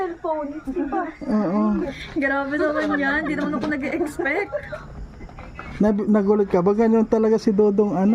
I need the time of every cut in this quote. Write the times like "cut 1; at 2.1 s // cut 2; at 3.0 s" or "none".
cut 1; at 1.9 s